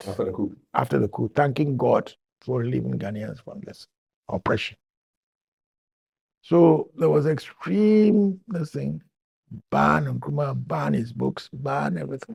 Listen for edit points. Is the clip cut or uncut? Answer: uncut